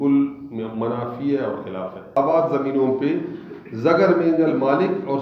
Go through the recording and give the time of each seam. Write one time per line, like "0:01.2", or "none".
0:02.1

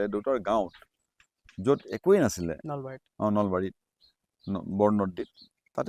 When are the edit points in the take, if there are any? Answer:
none

